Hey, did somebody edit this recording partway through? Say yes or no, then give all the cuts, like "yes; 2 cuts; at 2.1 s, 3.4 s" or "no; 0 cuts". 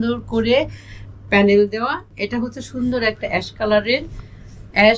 yes; 1 cut; at 2.1 s